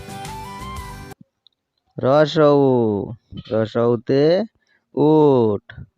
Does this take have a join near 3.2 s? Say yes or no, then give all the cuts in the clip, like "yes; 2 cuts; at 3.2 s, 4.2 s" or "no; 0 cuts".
no; 1 cut; at 1.0 s